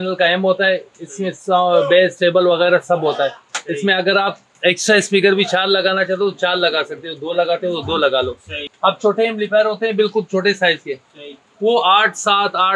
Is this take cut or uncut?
cut